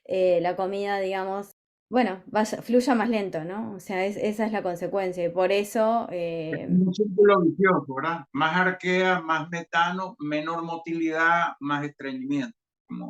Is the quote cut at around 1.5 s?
yes; 1 cut; at 1.5 s

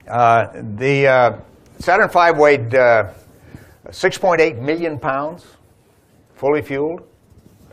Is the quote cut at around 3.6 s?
yes; 1 cut; at 3.6 s

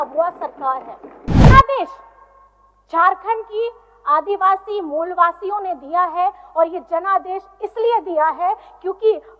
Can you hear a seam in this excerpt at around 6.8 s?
no; 1 cut; at 1.5 s

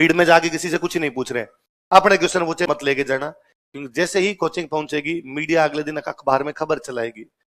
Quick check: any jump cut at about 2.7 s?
yes; 1 cut; at 2.7 s

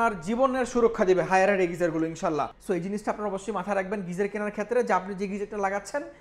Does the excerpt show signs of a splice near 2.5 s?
yes; 1 cut; at 2.5 s

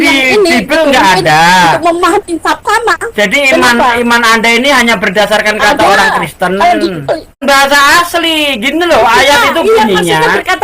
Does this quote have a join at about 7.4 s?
yes; 1 cut; at 7.4 s

